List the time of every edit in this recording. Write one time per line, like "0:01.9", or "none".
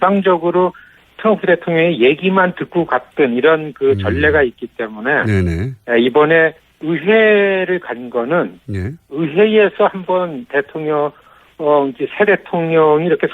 none